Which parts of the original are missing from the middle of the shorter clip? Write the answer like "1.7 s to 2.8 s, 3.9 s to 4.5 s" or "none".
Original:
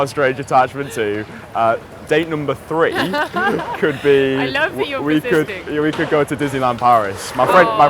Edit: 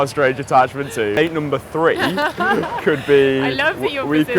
1.2 s to 2.1 s